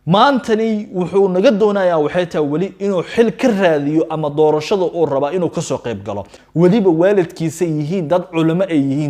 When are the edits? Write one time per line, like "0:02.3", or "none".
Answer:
0:06.4